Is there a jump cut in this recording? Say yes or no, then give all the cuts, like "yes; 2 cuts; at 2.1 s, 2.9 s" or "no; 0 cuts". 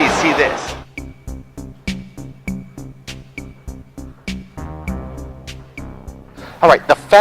yes; 1 cut; at 4.0 s